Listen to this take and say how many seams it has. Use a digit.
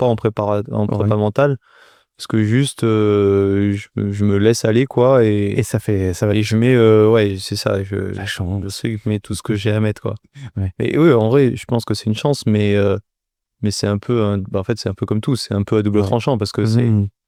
0